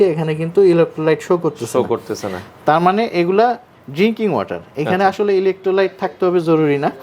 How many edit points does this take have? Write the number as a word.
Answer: zero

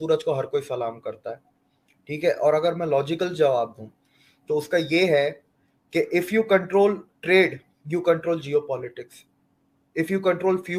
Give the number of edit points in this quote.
zero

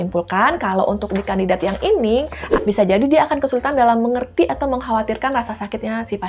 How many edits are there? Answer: one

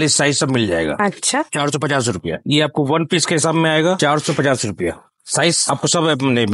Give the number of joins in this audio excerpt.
zero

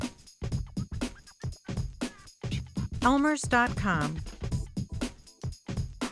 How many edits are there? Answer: two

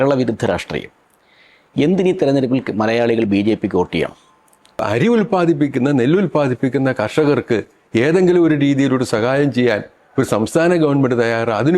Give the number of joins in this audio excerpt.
one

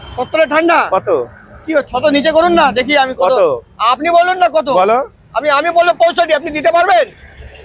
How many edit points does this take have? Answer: zero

